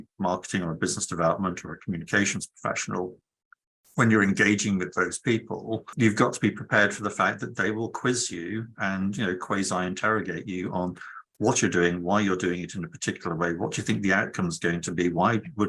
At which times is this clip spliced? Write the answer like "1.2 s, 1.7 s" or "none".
5.9 s